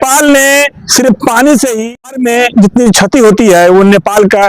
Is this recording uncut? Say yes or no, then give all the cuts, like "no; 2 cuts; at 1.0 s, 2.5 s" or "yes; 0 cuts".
no; 1 cut; at 1.8 s